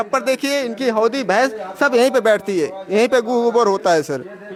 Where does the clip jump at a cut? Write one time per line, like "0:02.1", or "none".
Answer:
none